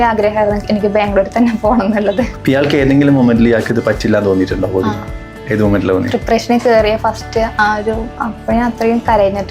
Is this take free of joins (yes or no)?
no